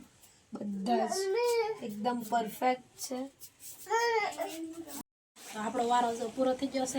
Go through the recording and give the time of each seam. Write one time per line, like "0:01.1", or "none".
0:05.0